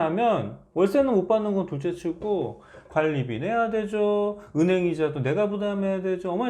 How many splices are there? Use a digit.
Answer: 0